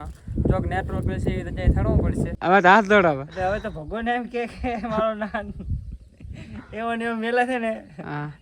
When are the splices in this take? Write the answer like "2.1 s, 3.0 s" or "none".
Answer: 2.3 s